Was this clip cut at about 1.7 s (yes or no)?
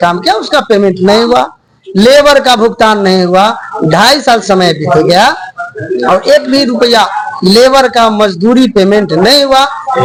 no